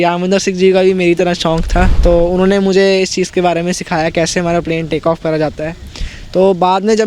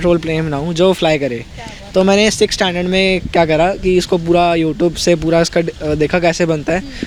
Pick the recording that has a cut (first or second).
first